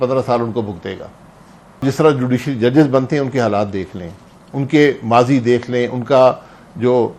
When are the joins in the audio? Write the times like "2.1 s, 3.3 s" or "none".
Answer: 1.8 s